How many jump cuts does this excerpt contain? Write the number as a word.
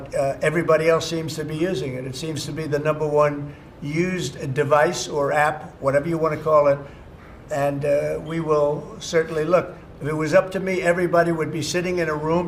zero